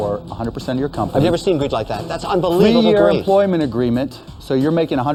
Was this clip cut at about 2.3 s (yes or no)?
no